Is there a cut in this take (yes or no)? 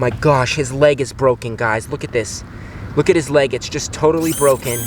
no